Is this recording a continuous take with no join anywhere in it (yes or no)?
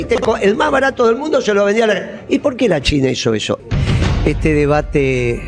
no